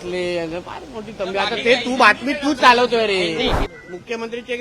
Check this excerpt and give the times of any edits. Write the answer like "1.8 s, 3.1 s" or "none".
3.6 s